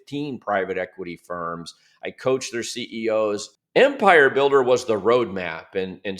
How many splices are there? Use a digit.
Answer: 1